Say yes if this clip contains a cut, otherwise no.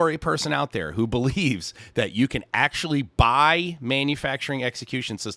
no